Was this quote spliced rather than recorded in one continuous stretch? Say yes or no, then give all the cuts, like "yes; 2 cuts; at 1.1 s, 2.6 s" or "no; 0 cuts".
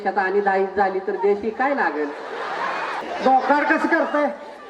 yes; 1 cut; at 3.0 s